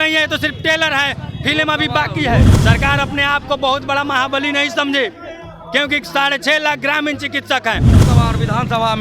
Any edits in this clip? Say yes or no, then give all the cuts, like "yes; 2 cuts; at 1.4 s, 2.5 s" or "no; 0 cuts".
yes; 2 cuts; at 2.5 s, 8.0 s